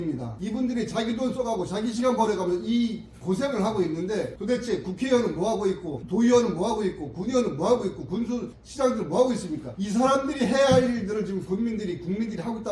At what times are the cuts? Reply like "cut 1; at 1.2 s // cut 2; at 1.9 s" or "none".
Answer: none